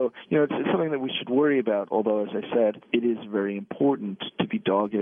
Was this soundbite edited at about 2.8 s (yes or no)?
yes